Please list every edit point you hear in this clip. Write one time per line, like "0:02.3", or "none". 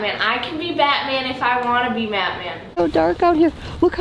0:02.8